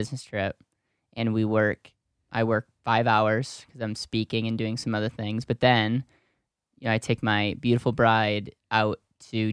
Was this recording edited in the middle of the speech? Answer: no; 0 cuts

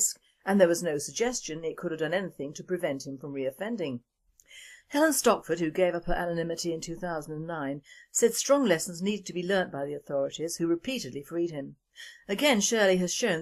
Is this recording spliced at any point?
no; 0 cuts

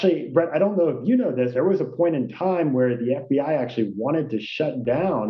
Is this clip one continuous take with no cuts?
no; 1 cut; at 1.5 s

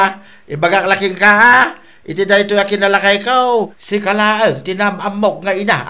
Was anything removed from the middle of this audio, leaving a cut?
yes; 1 cut; at 3.8 s

